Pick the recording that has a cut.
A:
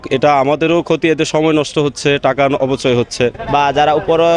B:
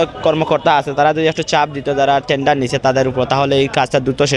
A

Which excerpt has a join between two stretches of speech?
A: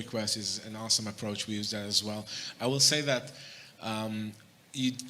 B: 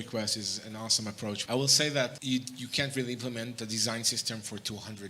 B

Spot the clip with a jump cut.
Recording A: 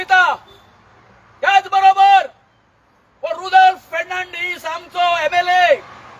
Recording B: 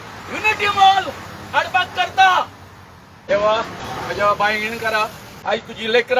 B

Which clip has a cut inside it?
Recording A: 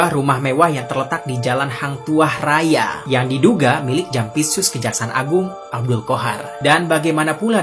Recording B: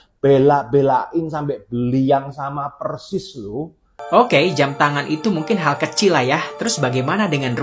B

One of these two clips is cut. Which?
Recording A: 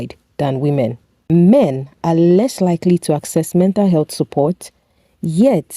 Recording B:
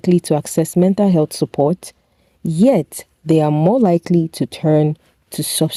A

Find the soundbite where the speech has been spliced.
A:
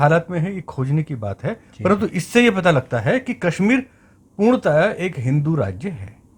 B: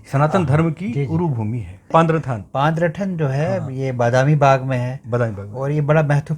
B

